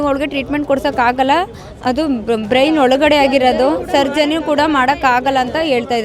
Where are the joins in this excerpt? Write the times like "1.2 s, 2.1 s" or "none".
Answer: none